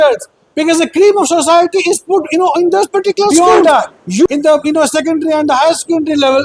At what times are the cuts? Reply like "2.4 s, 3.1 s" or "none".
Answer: 3.3 s